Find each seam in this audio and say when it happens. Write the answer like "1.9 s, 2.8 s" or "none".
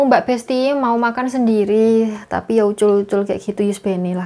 none